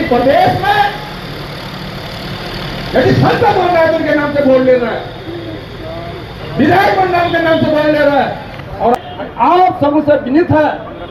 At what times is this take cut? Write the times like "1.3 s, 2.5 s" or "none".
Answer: 9.0 s

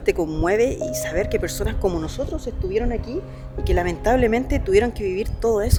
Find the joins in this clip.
none

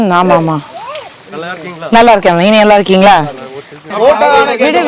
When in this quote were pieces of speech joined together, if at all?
3.9 s

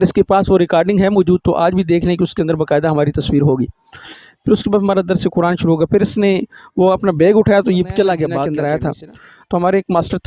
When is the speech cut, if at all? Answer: 8.4 s

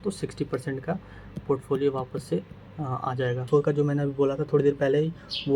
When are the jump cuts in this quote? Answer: 3.5 s

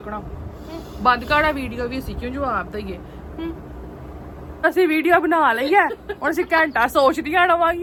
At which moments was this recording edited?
none

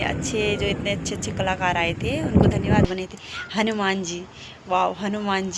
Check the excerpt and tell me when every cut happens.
2.9 s

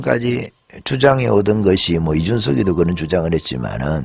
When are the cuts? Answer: none

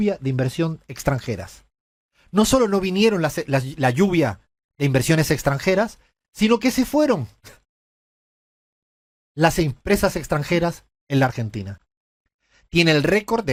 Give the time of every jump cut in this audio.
none

